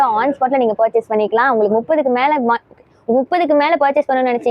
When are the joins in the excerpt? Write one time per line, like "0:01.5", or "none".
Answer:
none